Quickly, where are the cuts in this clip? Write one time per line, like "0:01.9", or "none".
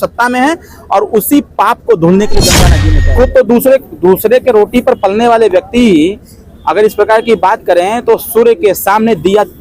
0:02.7